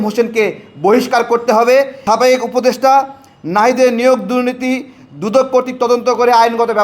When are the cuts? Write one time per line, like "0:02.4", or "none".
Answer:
0:02.0